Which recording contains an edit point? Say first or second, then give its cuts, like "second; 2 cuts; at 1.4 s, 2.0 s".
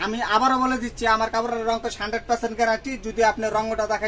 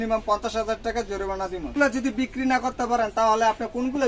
second; 1 cut; at 1.7 s